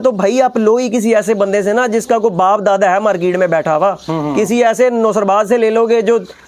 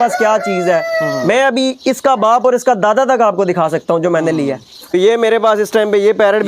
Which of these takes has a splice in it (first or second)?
second